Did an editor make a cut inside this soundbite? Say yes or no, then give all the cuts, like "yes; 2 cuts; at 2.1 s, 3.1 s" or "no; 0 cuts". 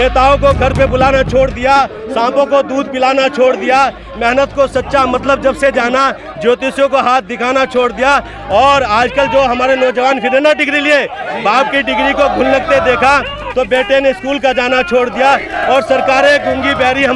no; 0 cuts